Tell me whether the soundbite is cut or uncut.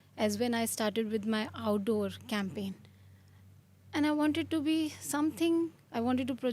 uncut